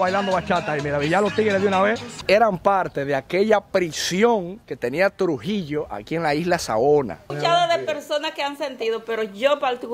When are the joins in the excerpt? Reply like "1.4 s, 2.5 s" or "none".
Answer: 2.1 s, 7.3 s